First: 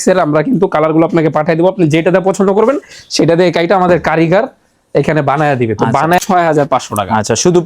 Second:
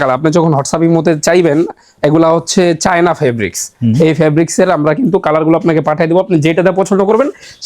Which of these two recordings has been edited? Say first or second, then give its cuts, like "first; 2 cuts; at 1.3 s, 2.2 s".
first; 1 cut; at 6.2 s